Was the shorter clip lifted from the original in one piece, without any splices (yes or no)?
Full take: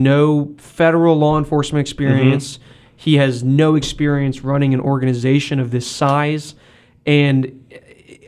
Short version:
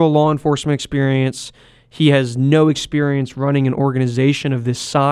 yes